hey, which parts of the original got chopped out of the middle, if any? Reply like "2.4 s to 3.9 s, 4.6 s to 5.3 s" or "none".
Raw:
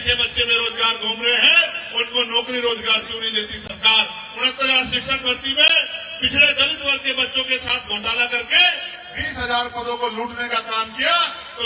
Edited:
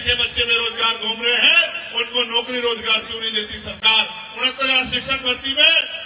none